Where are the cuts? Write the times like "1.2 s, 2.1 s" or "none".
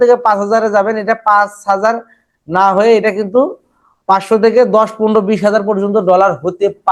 none